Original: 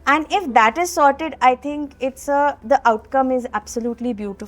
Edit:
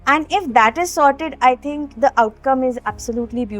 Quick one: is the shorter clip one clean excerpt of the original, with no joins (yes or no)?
no